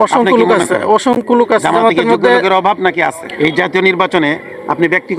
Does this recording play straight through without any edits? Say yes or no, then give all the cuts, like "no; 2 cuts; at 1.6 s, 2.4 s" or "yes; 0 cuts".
no; 1 cut; at 3.2 s